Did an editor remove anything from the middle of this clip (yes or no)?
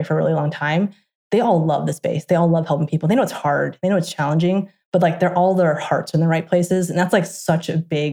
no